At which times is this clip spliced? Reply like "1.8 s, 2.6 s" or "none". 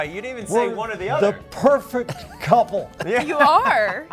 none